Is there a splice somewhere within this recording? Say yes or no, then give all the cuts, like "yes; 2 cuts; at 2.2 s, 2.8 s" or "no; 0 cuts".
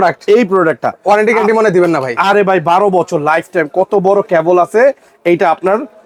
no; 0 cuts